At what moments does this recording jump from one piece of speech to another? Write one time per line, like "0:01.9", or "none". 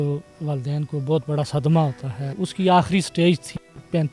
0:02.3

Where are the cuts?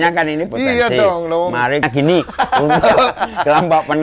0:01.8

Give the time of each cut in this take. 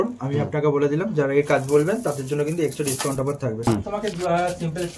0:03.7

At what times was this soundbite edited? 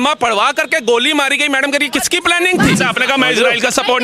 0:02.8

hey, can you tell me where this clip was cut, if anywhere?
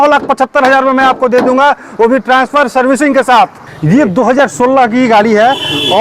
0:03.6

